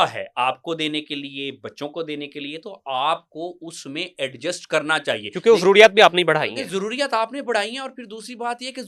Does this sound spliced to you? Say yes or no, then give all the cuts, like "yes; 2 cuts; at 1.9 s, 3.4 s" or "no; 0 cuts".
no; 0 cuts